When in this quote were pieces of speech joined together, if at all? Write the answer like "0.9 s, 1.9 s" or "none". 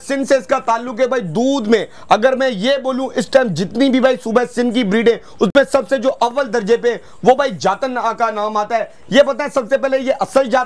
none